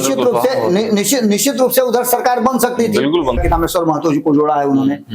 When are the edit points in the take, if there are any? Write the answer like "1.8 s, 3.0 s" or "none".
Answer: 3.4 s